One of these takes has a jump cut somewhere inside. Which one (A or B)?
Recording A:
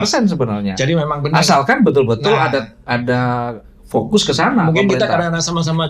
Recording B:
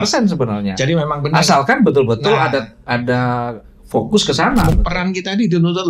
B